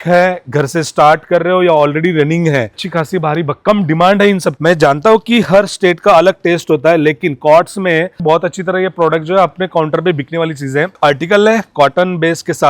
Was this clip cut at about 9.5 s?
no; 4 cuts; at 2.8 s, 4.6 s, 8.2 s, 10.9 s

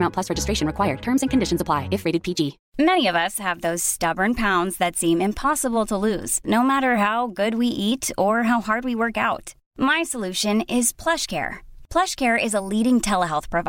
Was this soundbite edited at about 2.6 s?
yes; 1 cut; at 2.6 s

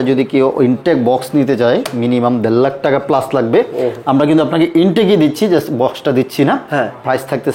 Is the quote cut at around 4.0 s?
no; 0 cuts

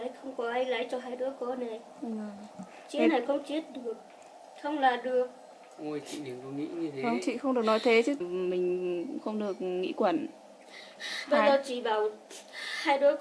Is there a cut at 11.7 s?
no; 1 cut; at 8.2 s

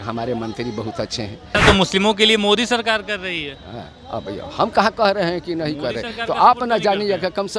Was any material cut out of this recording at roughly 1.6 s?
yes; 1 cut; at 1.6 s

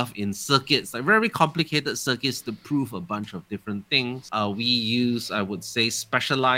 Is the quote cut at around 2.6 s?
no; 1 cut; at 4.2 s

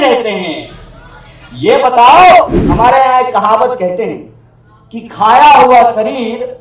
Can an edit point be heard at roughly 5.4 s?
no; 1 cut; at 2.6 s

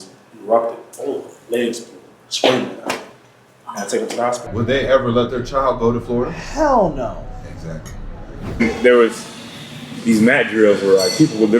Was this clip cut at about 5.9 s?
no; 2 cuts; at 4.5 s, 8.3 s

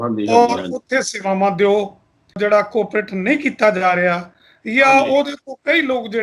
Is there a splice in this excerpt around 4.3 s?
no; 1 cut; at 2.4 s

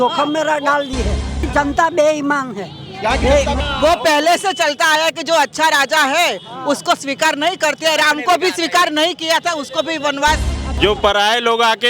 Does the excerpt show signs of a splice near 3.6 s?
yes; 3 cuts; at 1.4 s, 3.6 s, 10.6 s

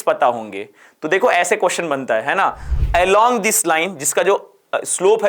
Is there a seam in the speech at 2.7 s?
yes; 1 cut; at 2.7 s

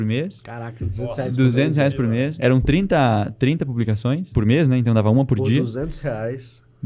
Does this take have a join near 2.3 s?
yes; 2 cuts; at 2.3 s, 4.3 s

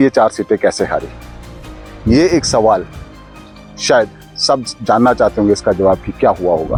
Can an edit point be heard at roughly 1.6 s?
no; 0 cuts

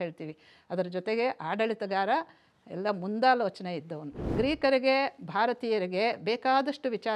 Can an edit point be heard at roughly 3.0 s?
no; 1 cut; at 4.3 s

